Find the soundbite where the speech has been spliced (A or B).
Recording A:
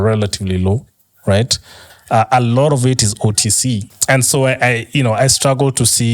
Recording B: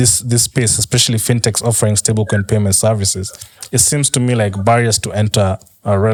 A